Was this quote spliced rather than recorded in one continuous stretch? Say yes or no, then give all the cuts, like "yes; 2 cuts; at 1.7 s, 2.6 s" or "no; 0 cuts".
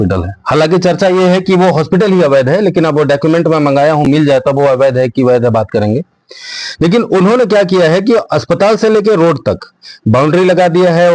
no; 0 cuts